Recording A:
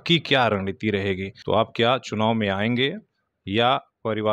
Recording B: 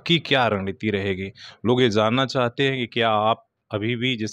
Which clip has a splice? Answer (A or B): A